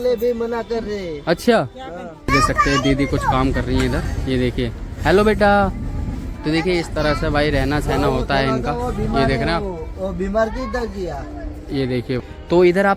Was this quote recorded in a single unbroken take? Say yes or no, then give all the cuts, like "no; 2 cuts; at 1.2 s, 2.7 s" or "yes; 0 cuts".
yes; 0 cuts